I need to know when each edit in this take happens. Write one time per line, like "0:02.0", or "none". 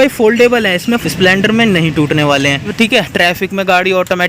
0:01.0
0:02.7